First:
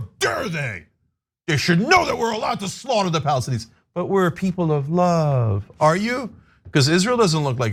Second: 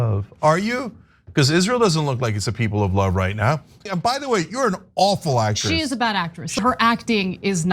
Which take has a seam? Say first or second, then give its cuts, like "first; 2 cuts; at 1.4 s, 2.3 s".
second; 2 cuts; at 3.8 s, 6.6 s